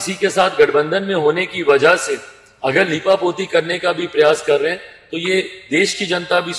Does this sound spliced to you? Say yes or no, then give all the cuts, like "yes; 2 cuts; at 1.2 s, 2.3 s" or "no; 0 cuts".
no; 0 cuts